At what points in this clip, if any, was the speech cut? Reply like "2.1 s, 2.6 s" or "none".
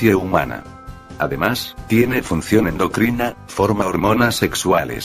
2.2 s